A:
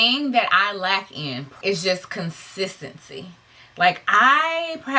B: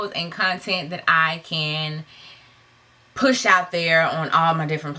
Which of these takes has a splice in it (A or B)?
A